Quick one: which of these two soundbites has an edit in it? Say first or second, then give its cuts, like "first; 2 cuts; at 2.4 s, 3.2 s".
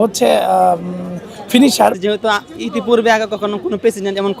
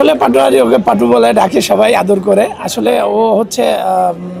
first; 1 cut; at 2.0 s